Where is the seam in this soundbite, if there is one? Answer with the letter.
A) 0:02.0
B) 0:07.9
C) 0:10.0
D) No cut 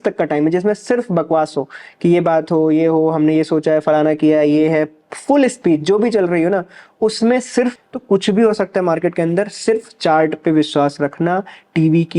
B